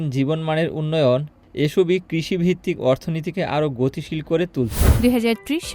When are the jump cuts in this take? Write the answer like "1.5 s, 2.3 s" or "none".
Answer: 4.8 s